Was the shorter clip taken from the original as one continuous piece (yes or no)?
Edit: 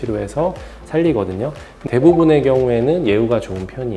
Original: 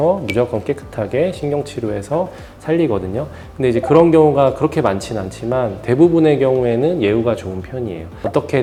no